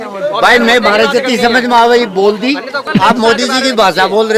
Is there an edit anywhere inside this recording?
yes; 1 cut; at 2.9 s

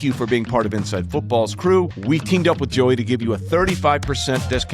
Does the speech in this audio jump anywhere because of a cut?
yes; 1 cut; at 2.0 s

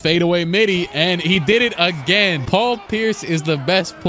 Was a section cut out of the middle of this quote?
no; 0 cuts

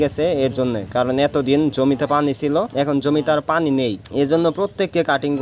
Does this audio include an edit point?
no; 0 cuts

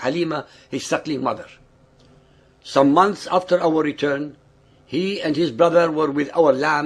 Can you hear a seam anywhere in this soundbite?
no; 0 cuts

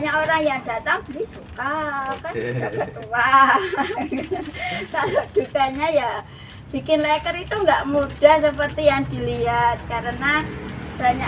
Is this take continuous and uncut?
yes; 0 cuts

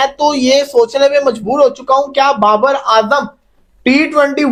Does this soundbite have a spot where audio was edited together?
no; 0 cuts

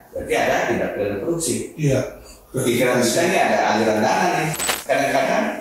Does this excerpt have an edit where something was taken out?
yes; 1 cut; at 4.7 s

